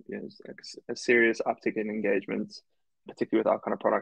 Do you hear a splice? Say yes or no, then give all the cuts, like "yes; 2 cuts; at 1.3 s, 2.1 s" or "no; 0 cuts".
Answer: yes; 1 cut; at 3.1 s